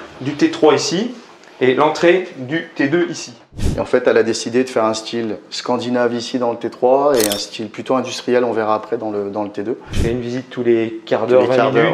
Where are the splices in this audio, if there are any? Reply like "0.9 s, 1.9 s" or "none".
3.7 s, 9.9 s